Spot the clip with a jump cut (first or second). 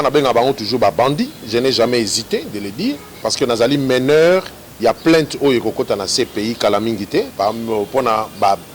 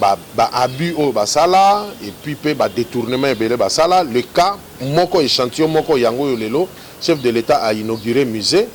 first